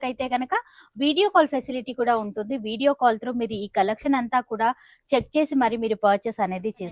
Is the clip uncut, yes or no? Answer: yes